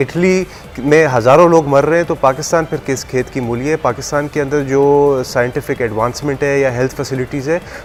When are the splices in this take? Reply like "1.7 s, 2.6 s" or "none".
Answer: none